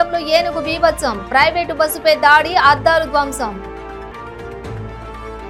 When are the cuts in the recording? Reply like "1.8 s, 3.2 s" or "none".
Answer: none